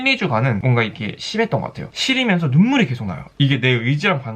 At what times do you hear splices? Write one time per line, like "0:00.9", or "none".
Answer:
0:01.9